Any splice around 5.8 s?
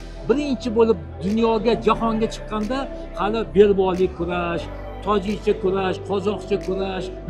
no; 0 cuts

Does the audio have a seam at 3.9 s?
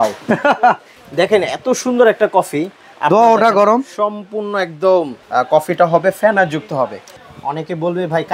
no; 3 cuts; at 0.9 s, 5.2 s, 7.2 s

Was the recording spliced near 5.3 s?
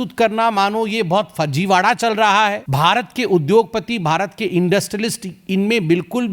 no; 1 cut; at 2.6 s

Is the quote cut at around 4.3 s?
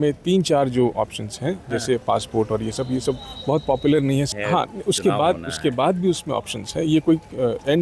yes; 1 cut; at 4.3 s

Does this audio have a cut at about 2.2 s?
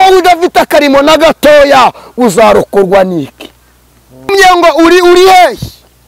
no; 1 cut; at 4.3 s

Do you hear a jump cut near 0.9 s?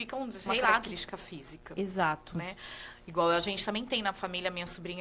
yes; 1 cut; at 0.9 s

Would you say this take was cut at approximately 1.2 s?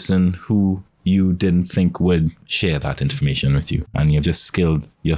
no; 2 cuts; at 2.5 s, 4.2 s

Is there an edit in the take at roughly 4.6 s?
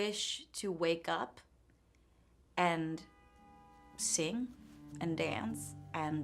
no; 0 cuts

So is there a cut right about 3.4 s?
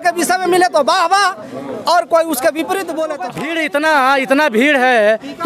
yes; 1 cut; at 3.4 s

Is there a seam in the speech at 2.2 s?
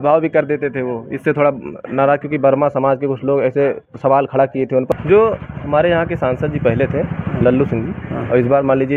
no; 1 cut; at 4.9 s

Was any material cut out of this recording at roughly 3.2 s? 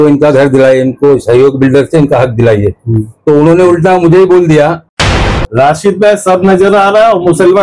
no; 1 cut; at 5.2 s

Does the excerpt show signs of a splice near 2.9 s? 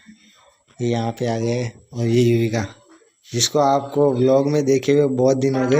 no; 0 cuts

